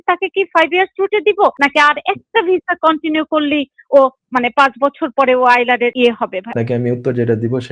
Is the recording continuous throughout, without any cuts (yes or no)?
no